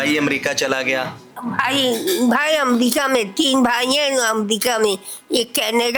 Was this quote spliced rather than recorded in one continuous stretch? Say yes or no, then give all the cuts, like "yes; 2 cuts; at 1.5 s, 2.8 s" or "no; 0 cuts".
no; 0 cuts